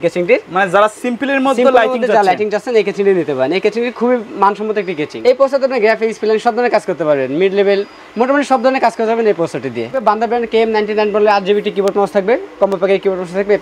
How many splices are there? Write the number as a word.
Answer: two